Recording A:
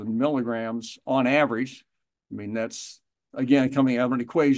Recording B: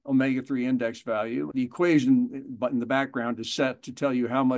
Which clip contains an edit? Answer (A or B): B